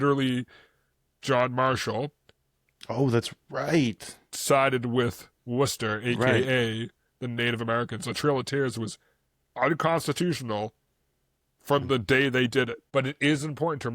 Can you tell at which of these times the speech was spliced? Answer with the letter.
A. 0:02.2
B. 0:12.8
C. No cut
B